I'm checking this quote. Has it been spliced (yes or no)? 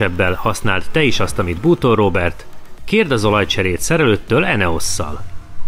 no